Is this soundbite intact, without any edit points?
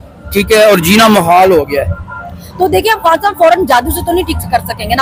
yes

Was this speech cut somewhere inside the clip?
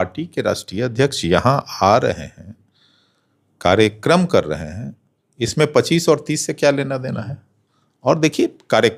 no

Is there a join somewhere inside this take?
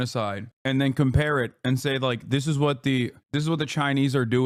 no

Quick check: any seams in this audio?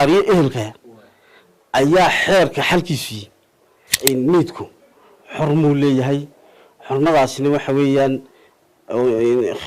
yes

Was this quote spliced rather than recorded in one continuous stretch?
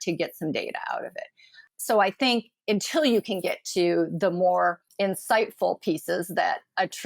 yes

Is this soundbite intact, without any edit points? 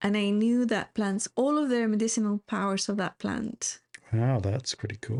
yes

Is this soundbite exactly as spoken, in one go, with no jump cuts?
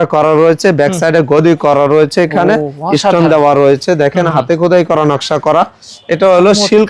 yes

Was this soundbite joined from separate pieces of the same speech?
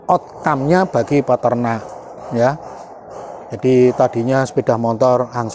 no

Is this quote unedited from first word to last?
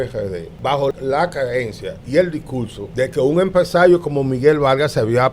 no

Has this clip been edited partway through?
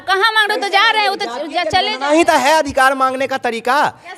no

